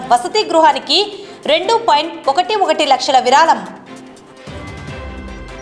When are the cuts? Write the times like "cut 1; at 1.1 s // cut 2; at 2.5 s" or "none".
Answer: none